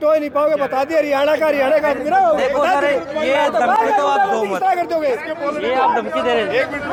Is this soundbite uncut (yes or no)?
yes